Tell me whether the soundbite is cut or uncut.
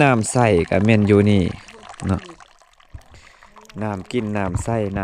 uncut